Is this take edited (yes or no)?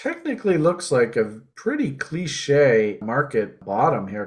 yes